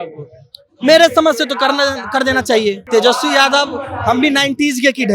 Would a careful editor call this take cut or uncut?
cut